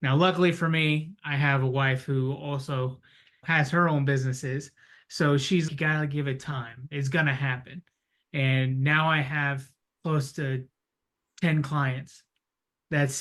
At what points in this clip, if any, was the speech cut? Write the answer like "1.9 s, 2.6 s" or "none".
none